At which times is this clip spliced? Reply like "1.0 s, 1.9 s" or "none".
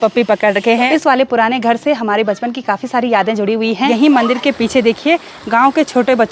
0.9 s, 3.9 s